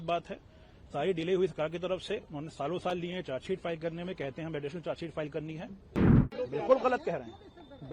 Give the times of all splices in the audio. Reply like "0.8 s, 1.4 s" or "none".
6.3 s